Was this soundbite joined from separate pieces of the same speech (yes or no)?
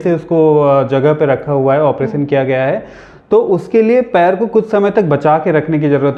no